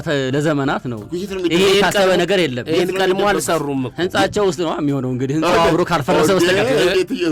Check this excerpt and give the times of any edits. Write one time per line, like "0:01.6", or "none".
none